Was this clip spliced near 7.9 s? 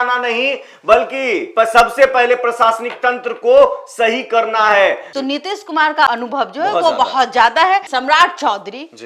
yes; 2 cuts; at 5.1 s, 7.9 s

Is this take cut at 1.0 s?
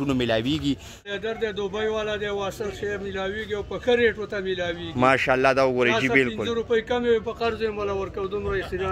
yes; 1 cut; at 1.0 s

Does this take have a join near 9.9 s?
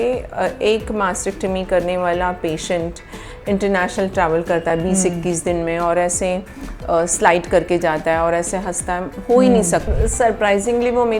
yes; 1 cut; at 9.9 s

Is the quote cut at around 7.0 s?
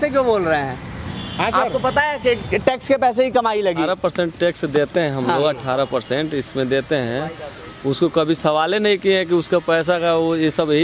no; 1 cut; at 3.8 s

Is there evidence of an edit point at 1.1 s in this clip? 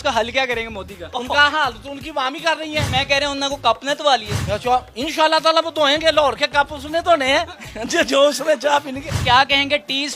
yes; 3 cuts; at 1.1 s, 2.9 s, 9.1 s

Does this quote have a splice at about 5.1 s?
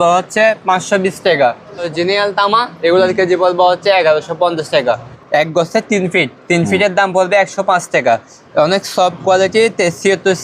yes; 2 cuts; at 1.9 s, 5.1 s

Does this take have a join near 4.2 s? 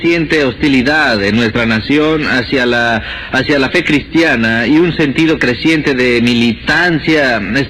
no; 0 cuts

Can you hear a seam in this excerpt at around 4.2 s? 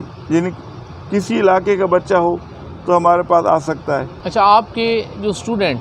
yes; 1 cut; at 4.2 s

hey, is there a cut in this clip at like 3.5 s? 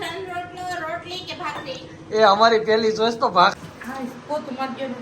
yes; 1 cut; at 3.5 s

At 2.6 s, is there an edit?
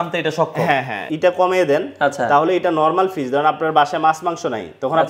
no; 1 cut; at 1.0 s

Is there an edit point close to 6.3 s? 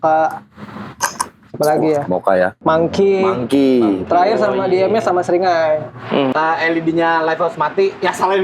yes; 2 cuts; at 2.6 s, 6.3 s

